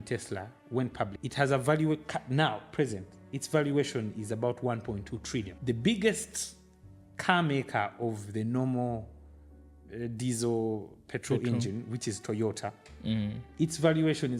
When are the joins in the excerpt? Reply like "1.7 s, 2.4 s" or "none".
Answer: 1.1 s, 5.5 s